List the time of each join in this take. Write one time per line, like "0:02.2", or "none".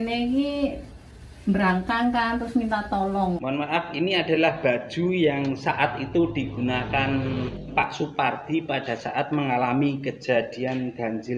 0:03.4
0:07.5